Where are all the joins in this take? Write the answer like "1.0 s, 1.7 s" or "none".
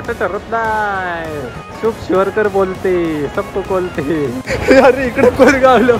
1.6 s, 4.5 s